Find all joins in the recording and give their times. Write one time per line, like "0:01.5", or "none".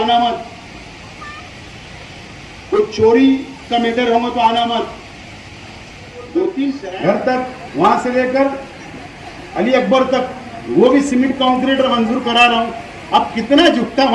0:06.9